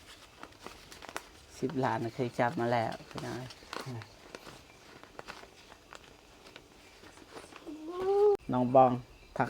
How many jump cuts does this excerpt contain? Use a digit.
1